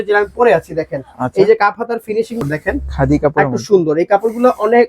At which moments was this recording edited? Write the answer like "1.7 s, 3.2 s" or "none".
2.4 s